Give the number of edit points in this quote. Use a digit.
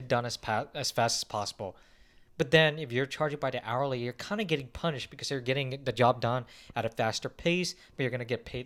0